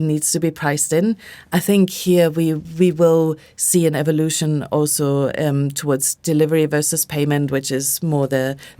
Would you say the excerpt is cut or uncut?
uncut